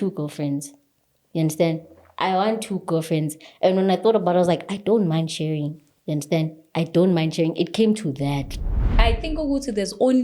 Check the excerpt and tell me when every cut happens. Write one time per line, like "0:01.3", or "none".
0:08.8